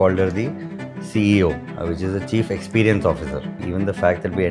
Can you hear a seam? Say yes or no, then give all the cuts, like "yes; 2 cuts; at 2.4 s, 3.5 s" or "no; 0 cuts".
yes; 2 cuts; at 1.7 s, 3.6 s